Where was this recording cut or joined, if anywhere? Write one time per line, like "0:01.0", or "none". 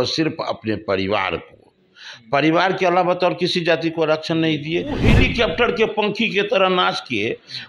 0:05.1